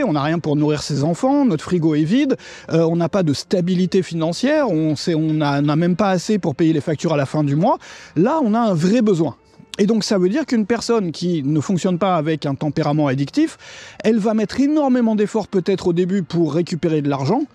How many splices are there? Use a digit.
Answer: 0